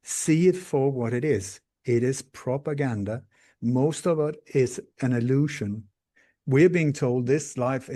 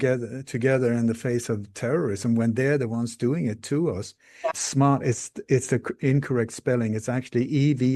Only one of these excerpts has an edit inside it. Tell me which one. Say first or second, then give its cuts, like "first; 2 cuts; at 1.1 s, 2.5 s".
second; 1 cut; at 4.5 s